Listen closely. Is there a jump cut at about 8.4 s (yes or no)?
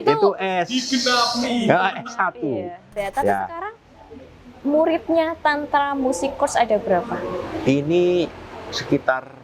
no